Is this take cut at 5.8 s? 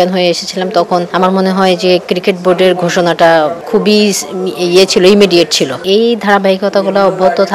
yes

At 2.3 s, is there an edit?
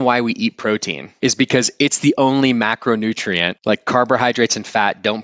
no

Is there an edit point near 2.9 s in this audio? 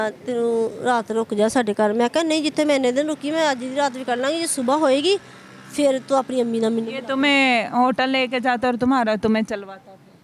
no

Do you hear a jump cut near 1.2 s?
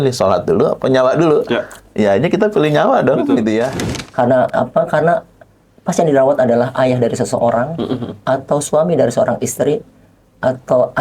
no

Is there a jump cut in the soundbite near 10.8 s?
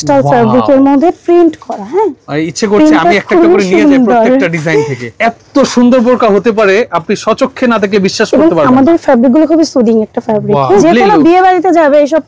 yes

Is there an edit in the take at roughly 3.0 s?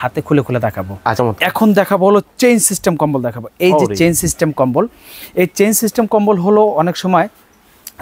no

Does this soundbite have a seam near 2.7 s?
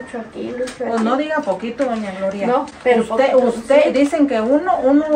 no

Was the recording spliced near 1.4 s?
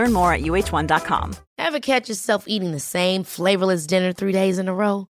yes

